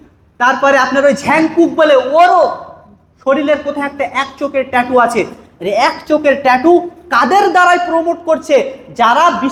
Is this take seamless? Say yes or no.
yes